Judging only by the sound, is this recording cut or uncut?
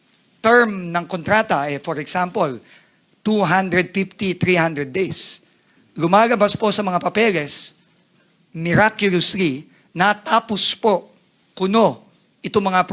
uncut